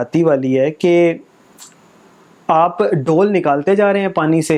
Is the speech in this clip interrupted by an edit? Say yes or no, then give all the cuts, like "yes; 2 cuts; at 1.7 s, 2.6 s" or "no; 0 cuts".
no; 0 cuts